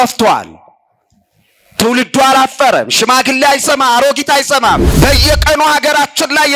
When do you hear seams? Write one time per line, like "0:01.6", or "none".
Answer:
0:04.9

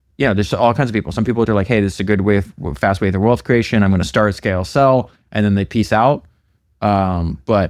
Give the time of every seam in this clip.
0:01.5

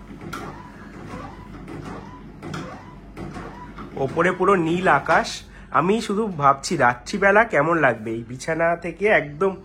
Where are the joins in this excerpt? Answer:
none

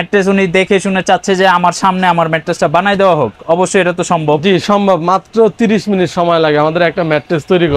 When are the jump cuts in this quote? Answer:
none

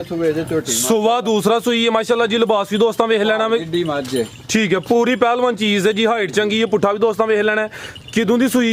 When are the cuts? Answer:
none

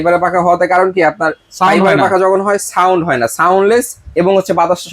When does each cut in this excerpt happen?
none

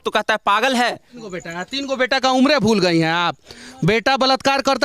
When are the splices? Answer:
0:01.3

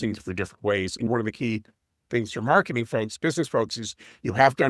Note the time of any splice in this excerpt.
0:01.1

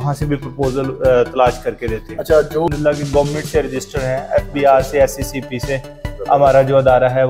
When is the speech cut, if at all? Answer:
0:02.7

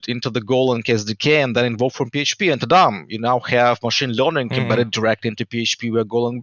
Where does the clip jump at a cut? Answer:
none

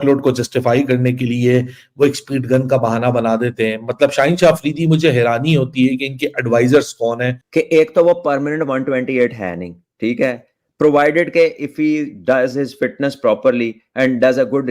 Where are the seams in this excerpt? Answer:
0:07.4

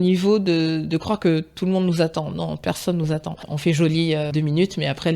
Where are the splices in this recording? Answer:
0:03.5
0:04.3

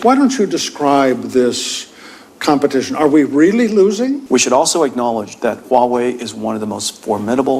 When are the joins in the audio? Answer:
0:04.2

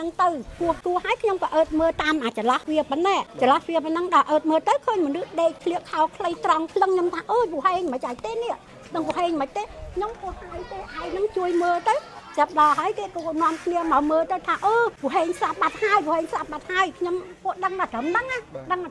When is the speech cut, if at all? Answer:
0:00.8
0:02.9
0:05.6
0:15.0

